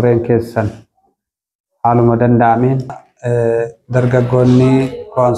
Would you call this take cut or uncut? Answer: cut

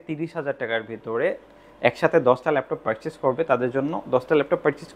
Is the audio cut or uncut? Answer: uncut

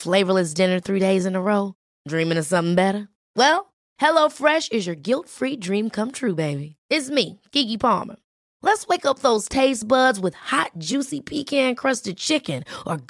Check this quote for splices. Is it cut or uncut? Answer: uncut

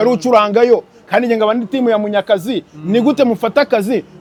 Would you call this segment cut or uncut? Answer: uncut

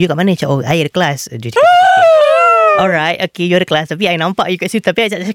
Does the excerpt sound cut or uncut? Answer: uncut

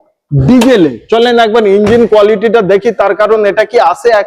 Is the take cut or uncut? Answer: uncut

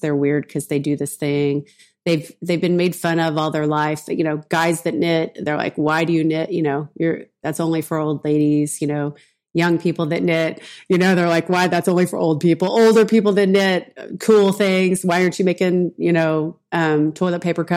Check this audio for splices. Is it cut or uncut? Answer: uncut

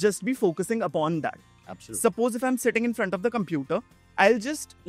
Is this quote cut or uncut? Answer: uncut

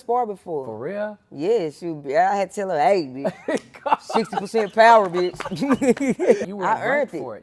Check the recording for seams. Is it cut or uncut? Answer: cut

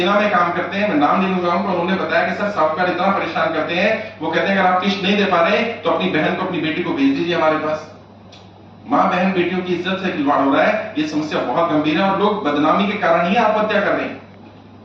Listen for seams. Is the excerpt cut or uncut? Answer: uncut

